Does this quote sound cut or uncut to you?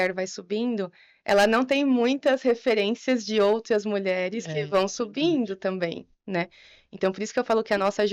uncut